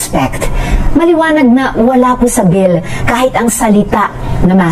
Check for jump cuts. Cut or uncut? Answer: uncut